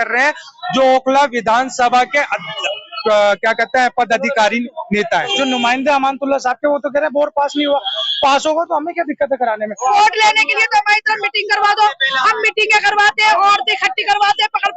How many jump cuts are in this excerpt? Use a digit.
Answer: 2